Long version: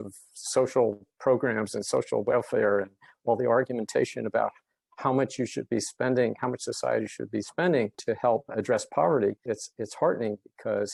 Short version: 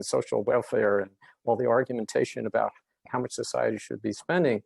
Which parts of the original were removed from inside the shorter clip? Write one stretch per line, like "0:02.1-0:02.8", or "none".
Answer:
0:04.9-0:06.4